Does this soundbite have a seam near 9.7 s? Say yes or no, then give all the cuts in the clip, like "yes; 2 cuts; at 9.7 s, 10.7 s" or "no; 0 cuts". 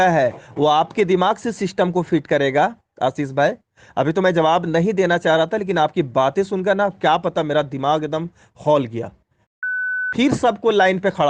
yes; 1 cut; at 9.7 s